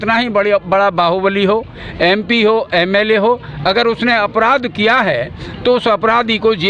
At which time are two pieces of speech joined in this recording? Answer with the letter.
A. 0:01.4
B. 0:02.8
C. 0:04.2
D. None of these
D